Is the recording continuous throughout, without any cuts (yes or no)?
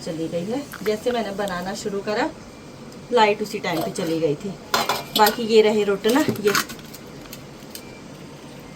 yes